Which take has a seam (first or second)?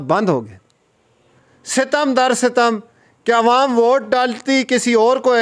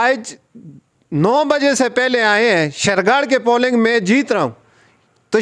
first